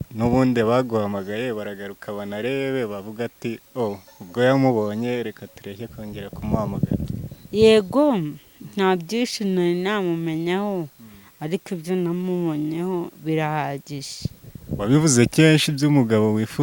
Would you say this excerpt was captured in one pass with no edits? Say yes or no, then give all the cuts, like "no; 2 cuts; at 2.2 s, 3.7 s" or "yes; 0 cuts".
yes; 0 cuts